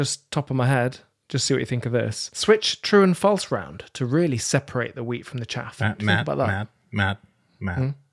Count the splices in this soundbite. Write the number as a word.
one